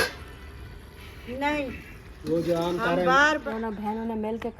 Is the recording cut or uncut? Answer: cut